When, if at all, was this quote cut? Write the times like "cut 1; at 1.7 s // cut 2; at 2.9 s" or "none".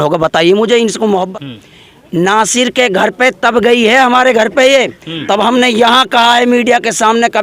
cut 1; at 1.3 s

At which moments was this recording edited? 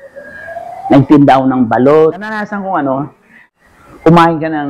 cut 1; at 2.5 s

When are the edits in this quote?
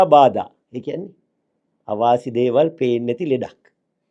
none

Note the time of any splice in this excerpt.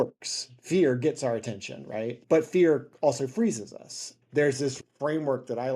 cut 1; at 4.8 s

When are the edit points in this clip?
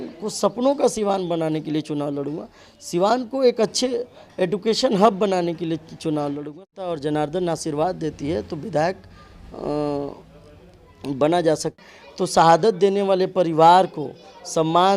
cut 1; at 6.9 s // cut 2; at 11.8 s

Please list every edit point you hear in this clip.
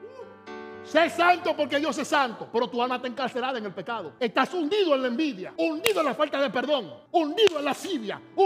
cut 1; at 4.1 s // cut 2; at 5.4 s // cut 3; at 7.0 s

